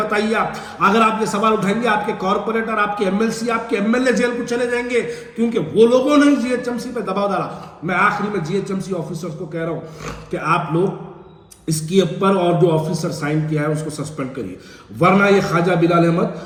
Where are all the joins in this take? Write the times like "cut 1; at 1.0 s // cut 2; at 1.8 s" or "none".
none